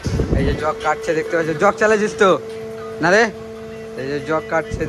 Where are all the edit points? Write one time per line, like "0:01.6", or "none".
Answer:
none